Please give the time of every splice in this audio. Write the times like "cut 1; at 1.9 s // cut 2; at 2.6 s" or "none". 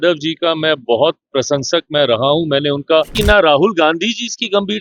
cut 1; at 3.2 s